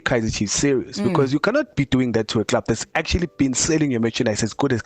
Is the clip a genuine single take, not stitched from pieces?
yes; 0 cuts

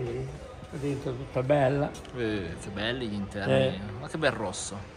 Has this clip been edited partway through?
no; 0 cuts

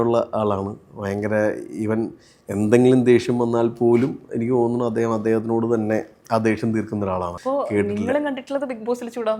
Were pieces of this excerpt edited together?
yes; 1 cut; at 7.3 s

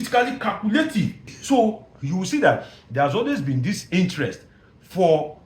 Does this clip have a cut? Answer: yes; 1 cut; at 1.3 s

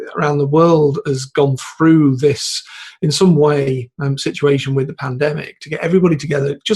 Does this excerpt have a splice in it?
no; 0 cuts

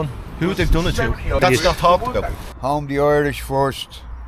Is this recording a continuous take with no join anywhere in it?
no; 2 cuts; at 1.4 s, 2.5 s

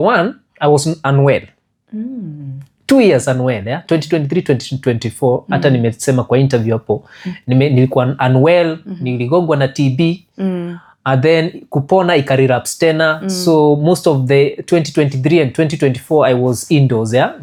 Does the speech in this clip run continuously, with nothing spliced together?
yes; 0 cuts

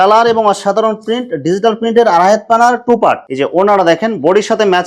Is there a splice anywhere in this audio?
yes; 1 cut; at 3.2 s

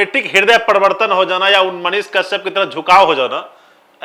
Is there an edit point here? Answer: no; 0 cuts

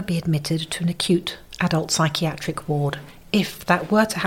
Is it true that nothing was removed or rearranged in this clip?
no; 1 cut; at 3.1 s

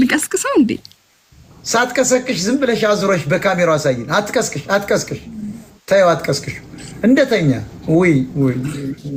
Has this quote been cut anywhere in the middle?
no; 0 cuts

